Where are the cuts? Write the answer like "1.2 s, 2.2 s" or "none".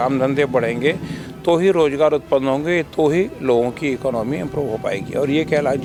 none